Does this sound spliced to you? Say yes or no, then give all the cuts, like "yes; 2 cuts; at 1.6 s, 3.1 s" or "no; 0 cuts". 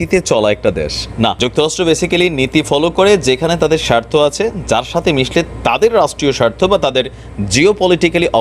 no; 0 cuts